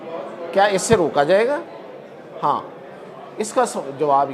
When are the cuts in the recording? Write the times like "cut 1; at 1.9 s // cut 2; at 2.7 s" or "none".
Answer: none